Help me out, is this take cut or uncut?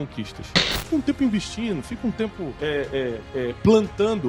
cut